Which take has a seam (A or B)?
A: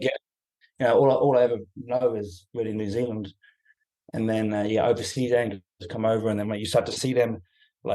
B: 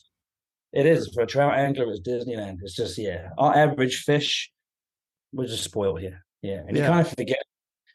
A